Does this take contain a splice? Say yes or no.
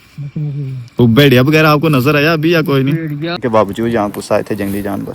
yes